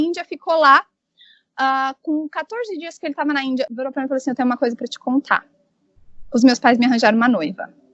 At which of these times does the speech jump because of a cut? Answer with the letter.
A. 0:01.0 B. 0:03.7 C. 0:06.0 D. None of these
B